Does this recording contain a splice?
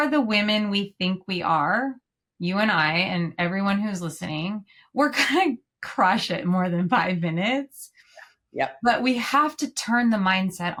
no; 0 cuts

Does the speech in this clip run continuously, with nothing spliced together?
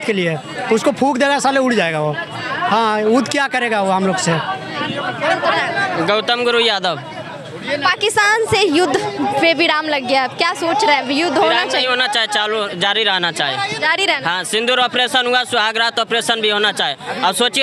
yes; 0 cuts

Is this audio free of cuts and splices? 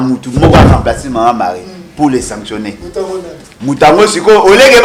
yes; 0 cuts

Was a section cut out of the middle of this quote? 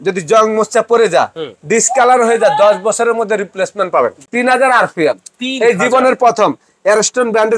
yes; 1 cut; at 4.2 s

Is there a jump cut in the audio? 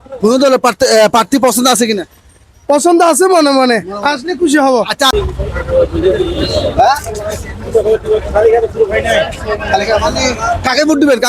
yes; 1 cut; at 5.1 s

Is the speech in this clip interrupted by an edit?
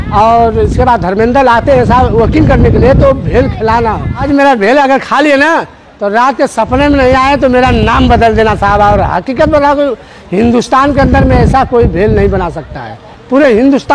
yes; 1 cut; at 4.2 s

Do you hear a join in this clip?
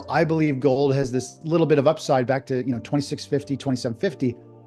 yes; 1 cut; at 1.3 s

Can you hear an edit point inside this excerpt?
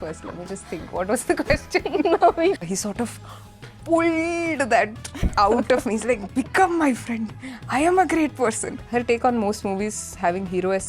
yes; 2 cuts; at 2.7 s, 8.7 s

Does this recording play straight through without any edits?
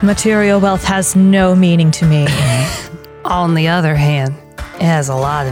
yes; 0 cuts

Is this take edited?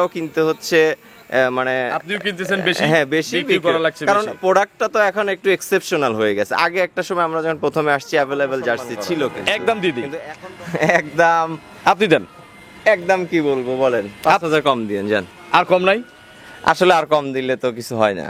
yes; 2 cuts; at 9.4 s, 15.3 s

